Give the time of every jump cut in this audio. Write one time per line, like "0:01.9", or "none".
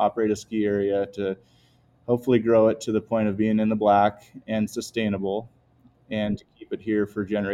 none